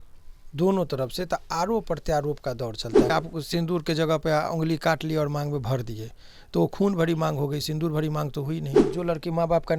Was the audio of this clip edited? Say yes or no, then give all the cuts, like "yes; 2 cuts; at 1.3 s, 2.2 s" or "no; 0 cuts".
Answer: yes; 2 cuts; at 3.1 s, 8.8 s